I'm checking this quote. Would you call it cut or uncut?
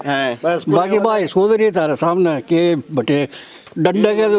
uncut